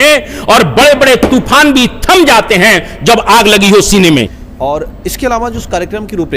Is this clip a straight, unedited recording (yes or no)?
no